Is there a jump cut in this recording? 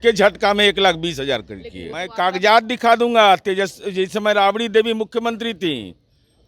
yes; 1 cut; at 2.1 s

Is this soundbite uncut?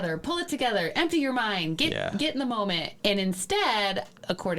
yes; 0 cuts

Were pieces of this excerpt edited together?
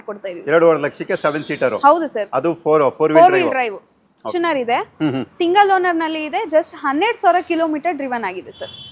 yes; 1 cut; at 4.3 s

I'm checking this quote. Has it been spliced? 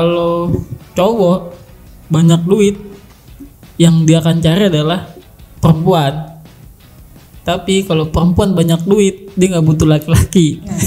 no; 0 cuts

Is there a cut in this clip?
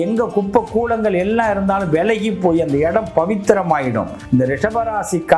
yes; 1 cut; at 4.2 s

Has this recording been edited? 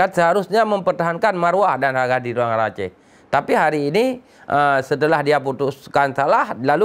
no; 0 cuts

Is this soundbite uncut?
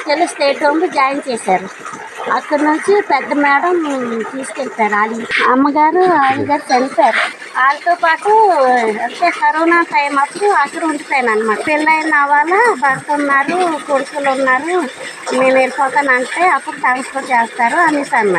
no; 3 cuts; at 5.4 s, 7.3 s, 11.6 s

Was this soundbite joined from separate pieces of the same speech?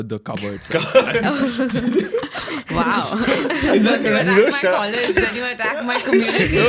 no; 0 cuts

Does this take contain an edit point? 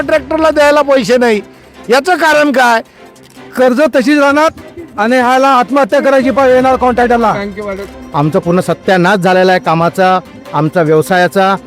yes; 2 cuts; at 3.2 s, 7.9 s

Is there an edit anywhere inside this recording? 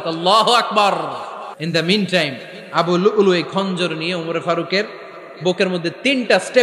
yes; 1 cut; at 1.6 s

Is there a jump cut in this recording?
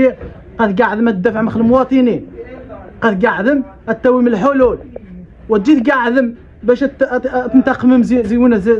no; 0 cuts

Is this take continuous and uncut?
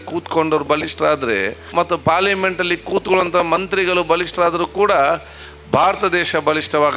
no; 1 cut; at 1.7 s

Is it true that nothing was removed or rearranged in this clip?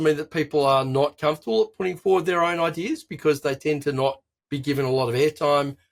yes; 0 cuts

